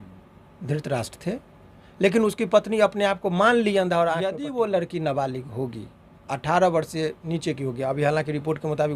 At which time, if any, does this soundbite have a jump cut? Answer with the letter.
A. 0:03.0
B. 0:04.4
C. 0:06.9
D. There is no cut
B